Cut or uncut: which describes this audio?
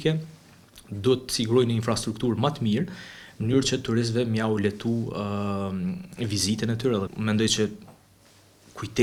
uncut